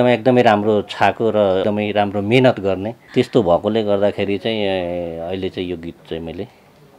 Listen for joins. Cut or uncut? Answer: uncut